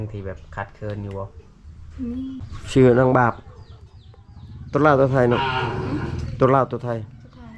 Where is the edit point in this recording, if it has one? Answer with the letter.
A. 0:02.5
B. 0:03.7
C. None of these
A